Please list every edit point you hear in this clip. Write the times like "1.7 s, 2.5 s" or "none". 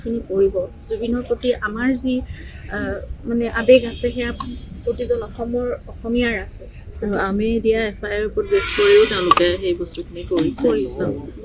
none